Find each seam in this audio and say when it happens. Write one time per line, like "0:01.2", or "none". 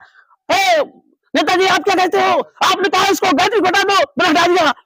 none